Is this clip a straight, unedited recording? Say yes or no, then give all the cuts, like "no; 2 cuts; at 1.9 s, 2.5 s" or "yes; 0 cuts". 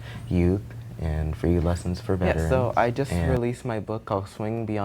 no; 1 cut; at 2.4 s